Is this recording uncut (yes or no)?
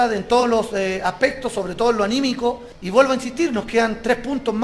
yes